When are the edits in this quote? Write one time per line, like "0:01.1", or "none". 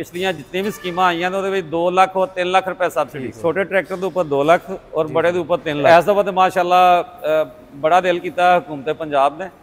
0:03.2
0:05.8